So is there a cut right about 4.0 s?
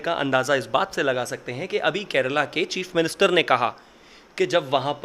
no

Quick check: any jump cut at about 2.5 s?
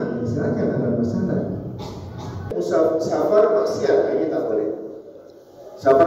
yes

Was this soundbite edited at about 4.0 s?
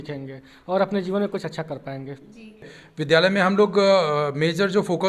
no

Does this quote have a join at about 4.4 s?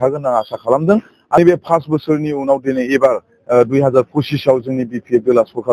no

